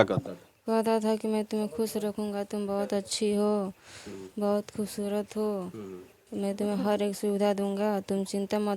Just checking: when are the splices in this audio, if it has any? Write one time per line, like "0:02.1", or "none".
none